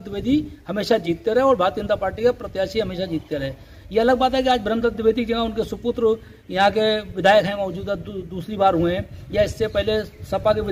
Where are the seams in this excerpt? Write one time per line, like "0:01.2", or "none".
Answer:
none